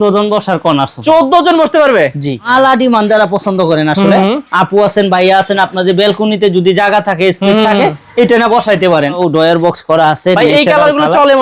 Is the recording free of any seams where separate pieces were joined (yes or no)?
no